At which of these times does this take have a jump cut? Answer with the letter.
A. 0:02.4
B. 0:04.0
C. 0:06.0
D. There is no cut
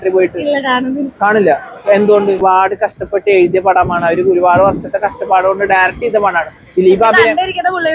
A